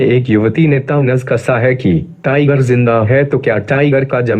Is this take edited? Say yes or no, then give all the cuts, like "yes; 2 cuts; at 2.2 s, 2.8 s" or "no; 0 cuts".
yes; 1 cut; at 2.1 s